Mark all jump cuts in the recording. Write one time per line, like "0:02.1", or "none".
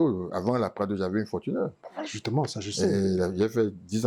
none